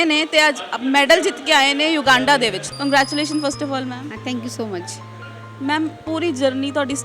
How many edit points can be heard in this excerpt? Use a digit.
1